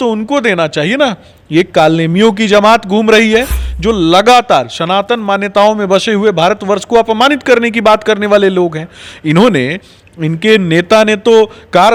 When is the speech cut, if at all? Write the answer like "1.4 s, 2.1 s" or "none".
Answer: none